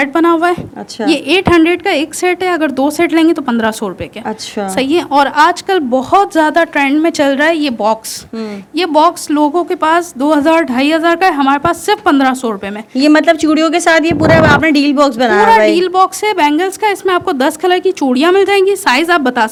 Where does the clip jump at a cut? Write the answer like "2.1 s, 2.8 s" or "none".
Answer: none

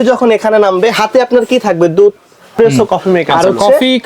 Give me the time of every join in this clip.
2.5 s

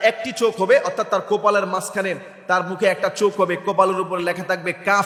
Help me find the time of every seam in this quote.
none

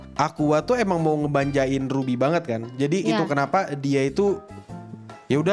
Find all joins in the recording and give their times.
none

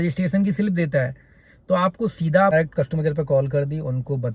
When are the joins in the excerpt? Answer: 2.5 s

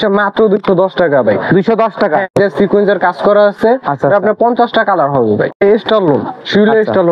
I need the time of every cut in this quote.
2.3 s, 5.6 s

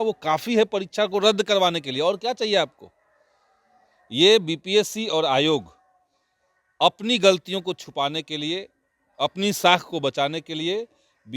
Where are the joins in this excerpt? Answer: none

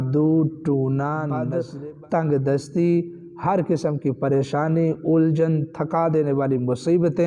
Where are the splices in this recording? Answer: 1.4 s

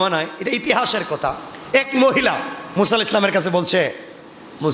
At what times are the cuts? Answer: 1.5 s, 2.6 s

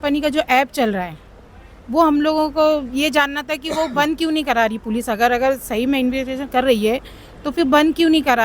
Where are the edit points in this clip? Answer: none

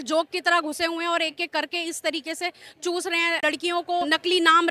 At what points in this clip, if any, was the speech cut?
3.4 s

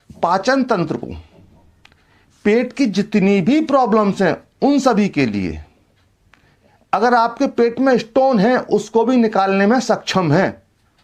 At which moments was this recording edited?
none

